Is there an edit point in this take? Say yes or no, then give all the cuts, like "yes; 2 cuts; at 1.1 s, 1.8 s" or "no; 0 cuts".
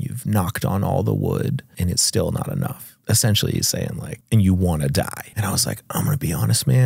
yes; 4 cuts; at 1.7 s, 2.9 s, 4.1 s, 5.2 s